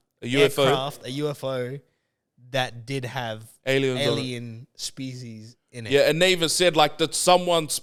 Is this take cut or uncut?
uncut